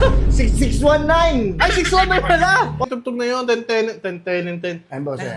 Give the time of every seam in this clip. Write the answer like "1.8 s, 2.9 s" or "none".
2.8 s